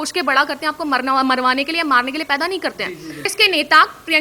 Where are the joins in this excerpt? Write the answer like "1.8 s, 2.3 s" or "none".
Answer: 3.2 s